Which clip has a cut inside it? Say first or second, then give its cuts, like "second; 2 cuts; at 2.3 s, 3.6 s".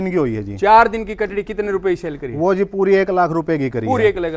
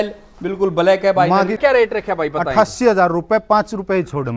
second; 1 cut; at 1.6 s